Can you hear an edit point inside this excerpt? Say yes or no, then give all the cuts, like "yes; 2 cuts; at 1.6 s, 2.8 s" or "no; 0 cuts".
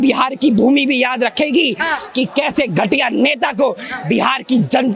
no; 0 cuts